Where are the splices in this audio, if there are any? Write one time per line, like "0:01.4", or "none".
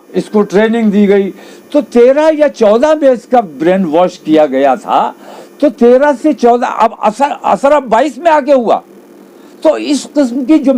none